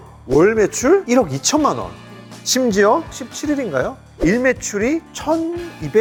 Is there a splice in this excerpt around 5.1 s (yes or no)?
no